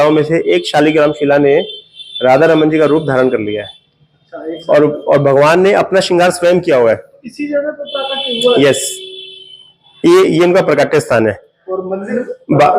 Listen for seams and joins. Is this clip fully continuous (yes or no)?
yes